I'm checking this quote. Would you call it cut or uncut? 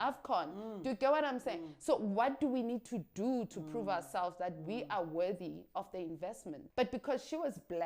cut